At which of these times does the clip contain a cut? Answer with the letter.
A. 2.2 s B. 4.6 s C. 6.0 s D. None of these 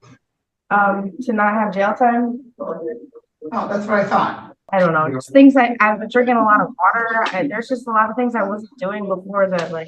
B